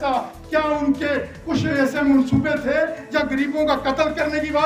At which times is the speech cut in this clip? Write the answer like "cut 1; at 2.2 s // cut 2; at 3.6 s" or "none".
none